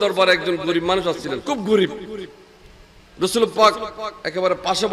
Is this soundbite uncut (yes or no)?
no